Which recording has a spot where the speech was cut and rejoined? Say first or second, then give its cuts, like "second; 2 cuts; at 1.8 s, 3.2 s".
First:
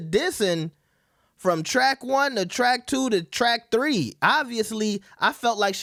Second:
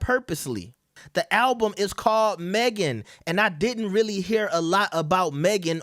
second; 1 cut; at 1.0 s